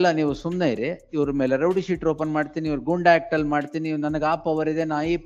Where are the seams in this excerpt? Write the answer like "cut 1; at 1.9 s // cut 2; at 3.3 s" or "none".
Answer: none